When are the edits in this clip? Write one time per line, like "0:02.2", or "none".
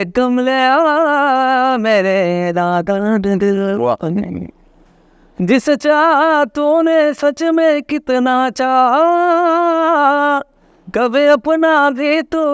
none